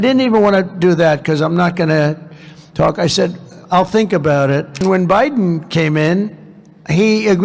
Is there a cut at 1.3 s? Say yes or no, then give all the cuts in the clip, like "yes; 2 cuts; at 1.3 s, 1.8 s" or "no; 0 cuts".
no; 1 cut; at 4.8 s